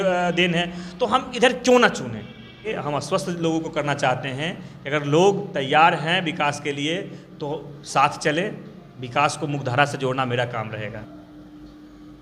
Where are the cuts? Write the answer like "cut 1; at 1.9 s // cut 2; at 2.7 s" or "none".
cut 1; at 2.7 s // cut 2; at 11.0 s

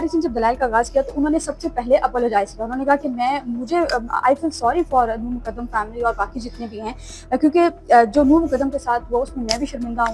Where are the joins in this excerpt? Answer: none

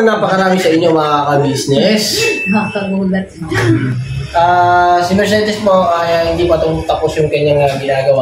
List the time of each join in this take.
cut 1; at 3.8 s

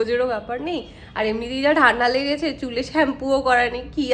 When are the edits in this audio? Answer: none

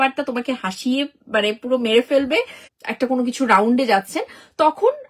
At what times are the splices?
cut 1; at 2.6 s

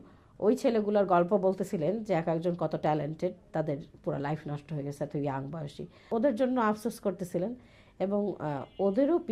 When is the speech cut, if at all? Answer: cut 1; at 6.1 s

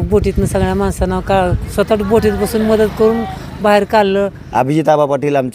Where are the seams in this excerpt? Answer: cut 1; at 4.4 s

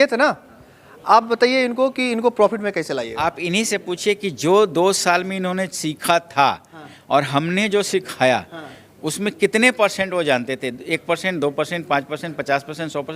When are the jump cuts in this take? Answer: cut 1; at 3.1 s

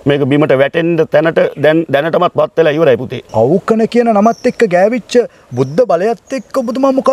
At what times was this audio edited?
cut 1; at 3.2 s

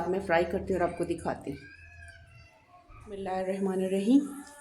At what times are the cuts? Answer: cut 1; at 3.2 s

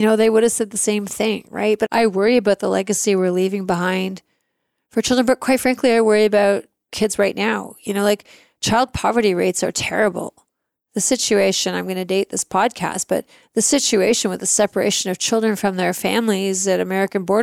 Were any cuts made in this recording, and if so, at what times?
cut 1; at 1.9 s

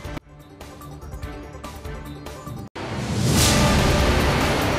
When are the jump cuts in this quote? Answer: cut 1; at 2.8 s

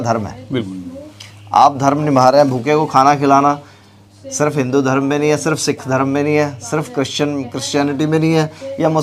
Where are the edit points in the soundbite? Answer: none

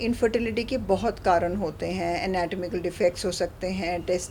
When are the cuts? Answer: none

